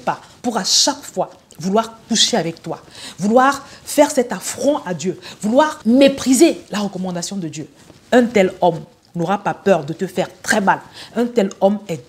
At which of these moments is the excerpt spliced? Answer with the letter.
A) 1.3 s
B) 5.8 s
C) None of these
B